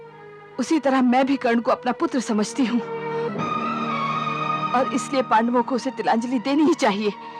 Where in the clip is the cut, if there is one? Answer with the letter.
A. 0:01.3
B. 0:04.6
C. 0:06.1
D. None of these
B